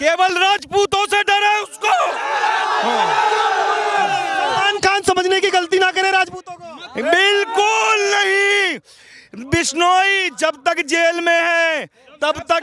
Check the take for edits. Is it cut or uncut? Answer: uncut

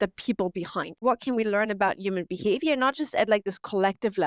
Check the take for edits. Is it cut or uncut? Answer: cut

